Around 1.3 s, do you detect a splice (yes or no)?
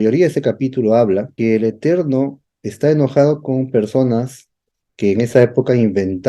yes